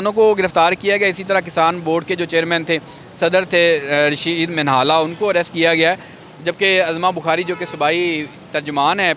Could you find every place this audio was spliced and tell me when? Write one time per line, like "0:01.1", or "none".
none